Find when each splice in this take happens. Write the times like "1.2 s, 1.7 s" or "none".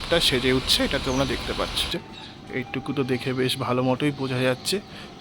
1.9 s